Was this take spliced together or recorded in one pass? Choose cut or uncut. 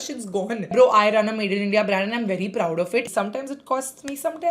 cut